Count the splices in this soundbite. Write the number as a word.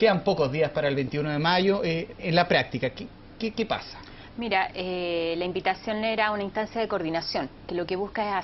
one